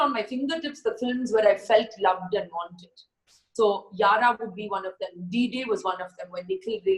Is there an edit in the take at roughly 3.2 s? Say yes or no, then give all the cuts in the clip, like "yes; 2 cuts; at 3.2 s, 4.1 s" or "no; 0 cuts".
no; 0 cuts